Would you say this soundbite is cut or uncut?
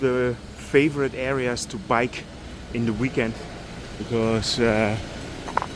uncut